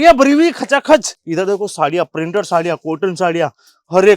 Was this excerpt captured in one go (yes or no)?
no